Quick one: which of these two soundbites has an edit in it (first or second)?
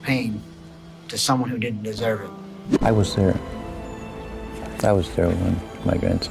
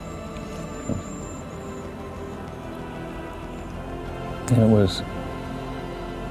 first